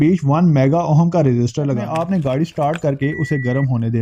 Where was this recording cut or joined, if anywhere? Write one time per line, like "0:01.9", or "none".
0:01.8